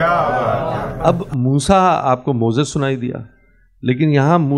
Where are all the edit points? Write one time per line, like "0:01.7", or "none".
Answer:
0:00.9